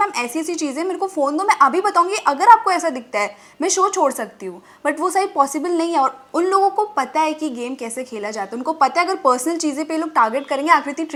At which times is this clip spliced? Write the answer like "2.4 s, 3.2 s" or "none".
none